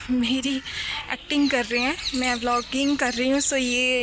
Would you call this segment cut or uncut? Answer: uncut